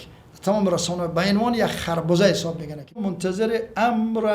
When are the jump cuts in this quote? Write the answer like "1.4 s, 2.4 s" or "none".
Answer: 3.0 s